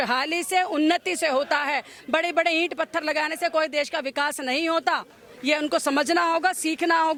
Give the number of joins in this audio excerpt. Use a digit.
0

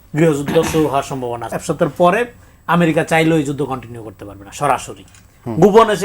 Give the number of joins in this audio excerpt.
1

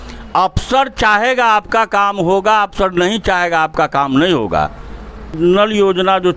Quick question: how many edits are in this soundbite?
1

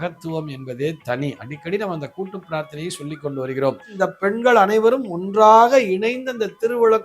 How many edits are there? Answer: 1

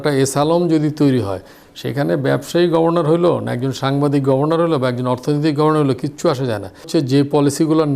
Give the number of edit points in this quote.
1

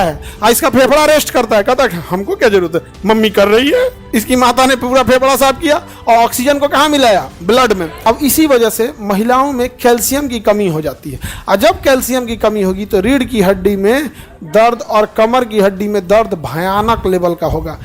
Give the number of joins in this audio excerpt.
2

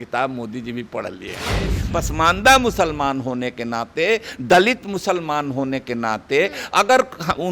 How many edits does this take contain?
1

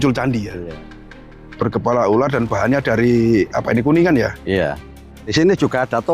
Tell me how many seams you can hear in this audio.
2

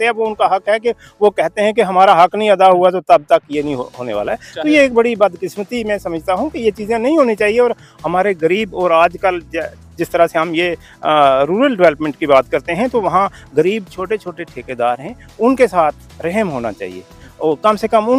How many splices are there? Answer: 0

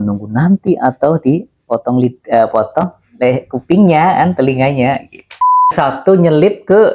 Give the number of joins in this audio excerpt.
1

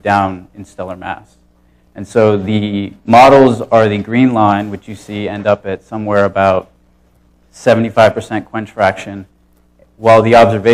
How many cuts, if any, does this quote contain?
1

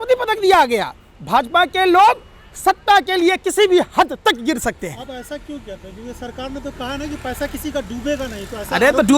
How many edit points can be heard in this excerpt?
0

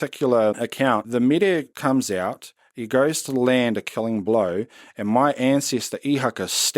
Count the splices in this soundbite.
1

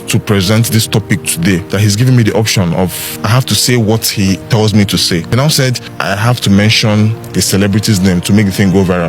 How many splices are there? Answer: 4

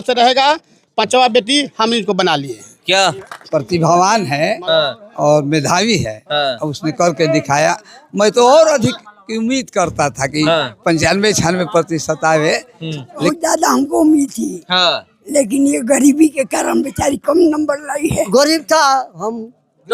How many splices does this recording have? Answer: 3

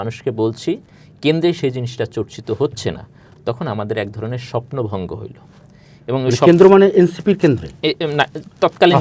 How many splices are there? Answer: 0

